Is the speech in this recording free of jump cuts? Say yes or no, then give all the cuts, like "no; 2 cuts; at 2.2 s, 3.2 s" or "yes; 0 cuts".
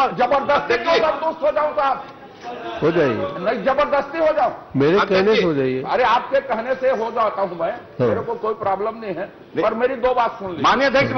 yes; 0 cuts